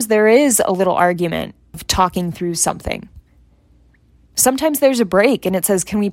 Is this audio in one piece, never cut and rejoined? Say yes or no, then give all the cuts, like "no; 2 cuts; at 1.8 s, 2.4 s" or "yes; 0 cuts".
no; 1 cut; at 1.8 s